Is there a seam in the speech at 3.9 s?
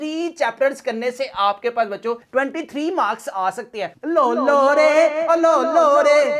yes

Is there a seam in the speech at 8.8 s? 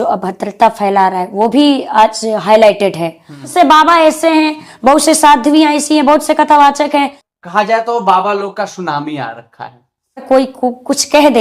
no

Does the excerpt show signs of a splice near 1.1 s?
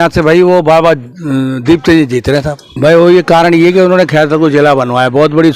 no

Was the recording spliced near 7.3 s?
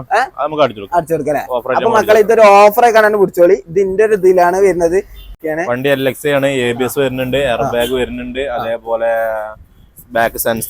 no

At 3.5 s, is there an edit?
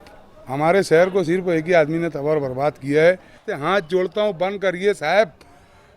yes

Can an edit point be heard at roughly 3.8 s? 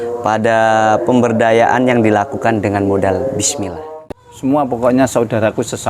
yes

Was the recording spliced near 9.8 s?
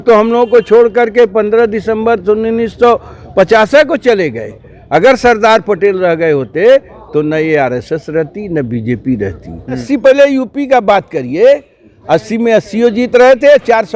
yes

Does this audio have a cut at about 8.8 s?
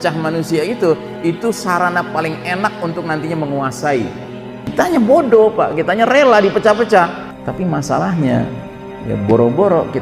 no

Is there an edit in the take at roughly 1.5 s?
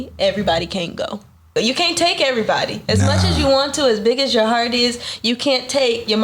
yes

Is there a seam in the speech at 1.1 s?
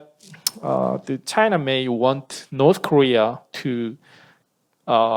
no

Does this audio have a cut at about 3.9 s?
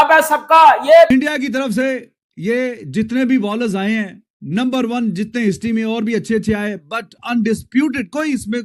no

